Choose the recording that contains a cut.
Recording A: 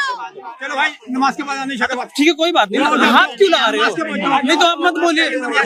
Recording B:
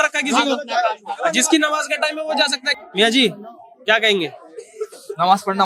B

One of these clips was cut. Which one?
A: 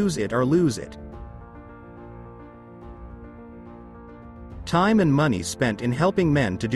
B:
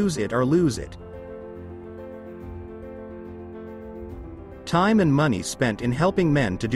B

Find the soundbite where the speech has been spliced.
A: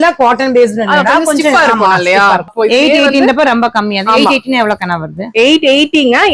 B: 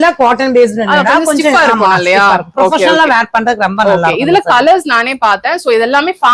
A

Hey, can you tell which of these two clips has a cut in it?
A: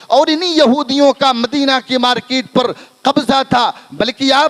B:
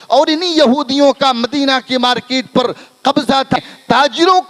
B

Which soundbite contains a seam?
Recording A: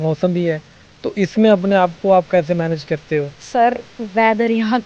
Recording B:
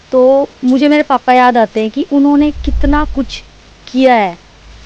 A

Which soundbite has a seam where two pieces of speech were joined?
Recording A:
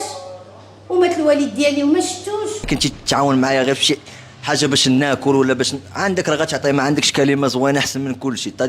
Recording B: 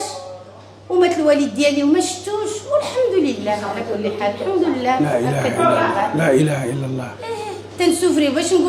A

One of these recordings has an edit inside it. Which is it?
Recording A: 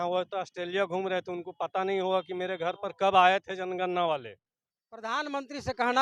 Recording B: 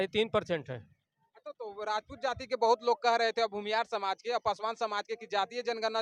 A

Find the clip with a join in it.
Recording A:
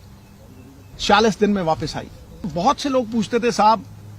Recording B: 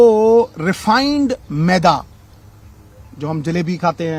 A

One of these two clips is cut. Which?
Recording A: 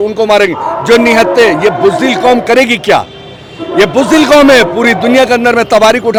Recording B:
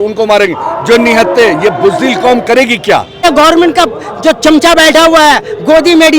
B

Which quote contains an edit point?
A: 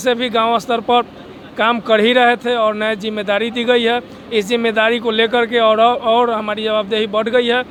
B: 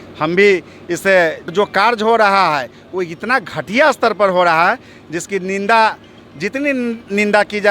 B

